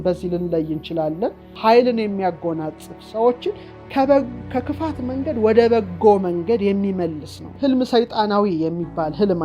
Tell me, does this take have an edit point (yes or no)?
yes